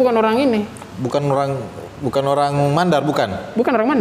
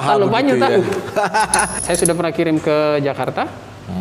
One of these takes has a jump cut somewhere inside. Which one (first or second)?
second